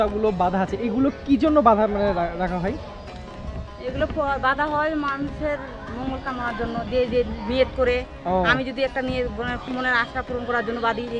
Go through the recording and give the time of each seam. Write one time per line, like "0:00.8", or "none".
none